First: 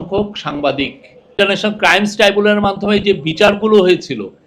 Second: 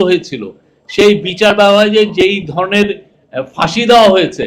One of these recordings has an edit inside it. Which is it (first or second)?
first